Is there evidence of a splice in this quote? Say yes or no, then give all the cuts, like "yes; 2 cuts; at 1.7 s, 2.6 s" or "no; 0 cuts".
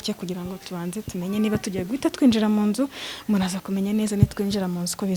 no; 0 cuts